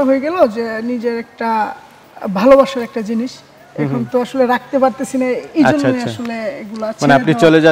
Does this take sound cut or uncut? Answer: uncut